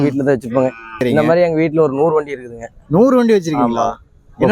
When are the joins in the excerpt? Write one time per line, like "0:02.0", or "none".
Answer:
0:01.0

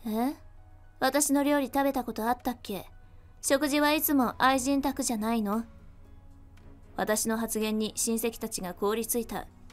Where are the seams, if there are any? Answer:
none

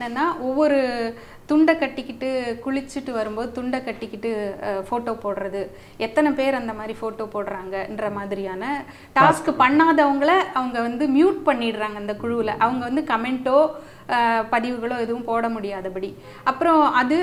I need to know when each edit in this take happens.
none

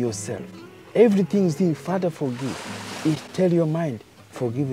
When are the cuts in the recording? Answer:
none

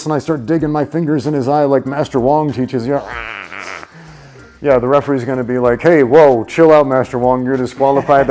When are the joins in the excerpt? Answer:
none

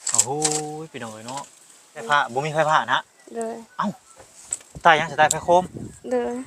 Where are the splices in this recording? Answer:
0:02.0

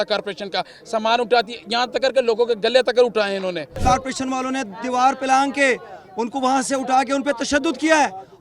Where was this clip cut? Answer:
0:03.7

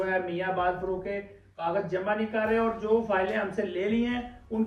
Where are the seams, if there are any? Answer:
none

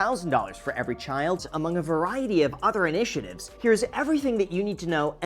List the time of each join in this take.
0:01.5

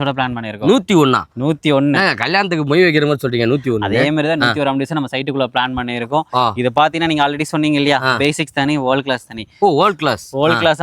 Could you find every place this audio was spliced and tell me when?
none

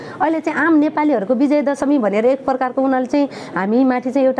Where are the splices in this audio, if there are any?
none

